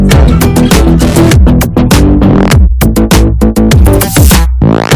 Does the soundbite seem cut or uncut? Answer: uncut